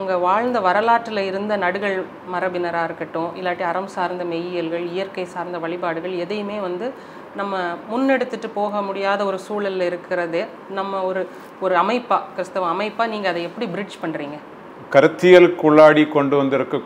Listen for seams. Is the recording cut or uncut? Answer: uncut